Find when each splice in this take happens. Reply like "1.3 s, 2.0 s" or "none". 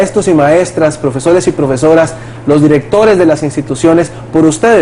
none